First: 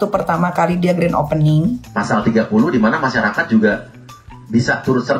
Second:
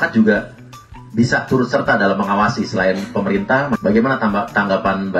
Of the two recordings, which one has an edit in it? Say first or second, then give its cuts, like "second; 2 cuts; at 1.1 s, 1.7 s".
first; 1 cut; at 1.8 s